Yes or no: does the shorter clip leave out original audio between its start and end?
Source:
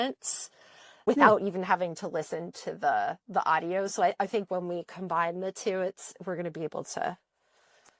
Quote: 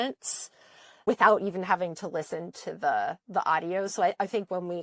no